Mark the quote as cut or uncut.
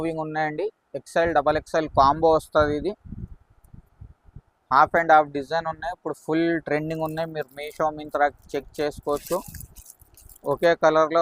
uncut